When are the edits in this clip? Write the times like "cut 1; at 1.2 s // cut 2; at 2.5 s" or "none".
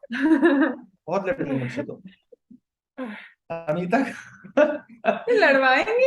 cut 1; at 3.3 s